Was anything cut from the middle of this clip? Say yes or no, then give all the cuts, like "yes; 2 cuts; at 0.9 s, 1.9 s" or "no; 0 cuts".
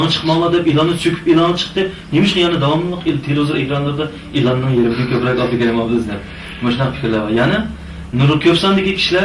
no; 0 cuts